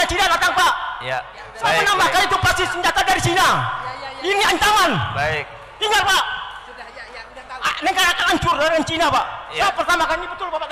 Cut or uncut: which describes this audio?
uncut